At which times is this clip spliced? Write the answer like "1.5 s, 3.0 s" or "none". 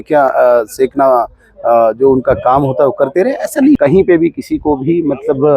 3.8 s